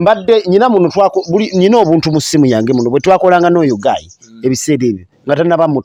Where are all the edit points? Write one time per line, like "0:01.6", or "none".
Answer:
none